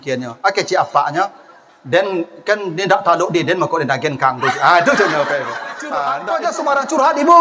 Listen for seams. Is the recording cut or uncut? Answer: cut